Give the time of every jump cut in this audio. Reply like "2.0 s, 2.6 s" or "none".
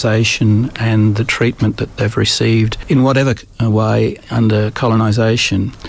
2.8 s

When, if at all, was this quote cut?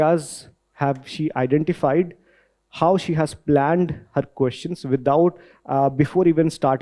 none

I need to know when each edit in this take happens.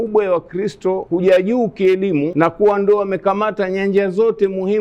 1.0 s, 2.3 s

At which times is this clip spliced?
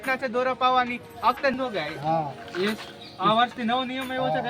1.5 s

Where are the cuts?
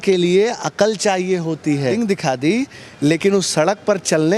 1.9 s

